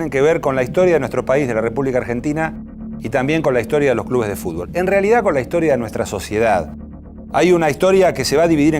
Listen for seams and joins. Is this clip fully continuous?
no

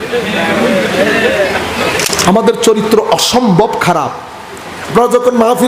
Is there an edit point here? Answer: yes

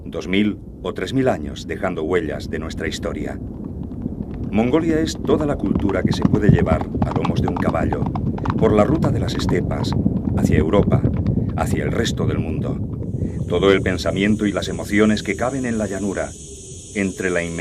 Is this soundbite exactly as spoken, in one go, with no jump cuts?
no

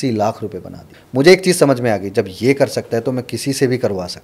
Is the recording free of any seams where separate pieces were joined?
no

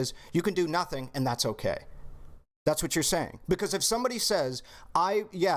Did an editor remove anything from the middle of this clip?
no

